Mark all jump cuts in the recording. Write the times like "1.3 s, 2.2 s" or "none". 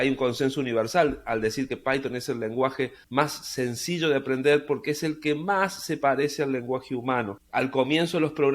3.0 s, 7.4 s